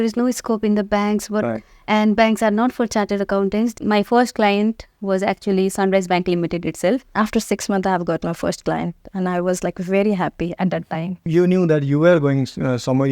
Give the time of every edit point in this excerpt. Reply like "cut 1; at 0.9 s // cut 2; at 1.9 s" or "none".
cut 1; at 3.7 s // cut 2; at 7.1 s // cut 3; at 11.3 s